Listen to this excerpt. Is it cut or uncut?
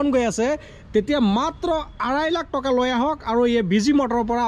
uncut